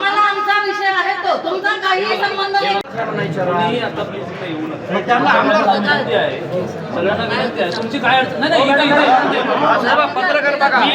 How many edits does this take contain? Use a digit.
1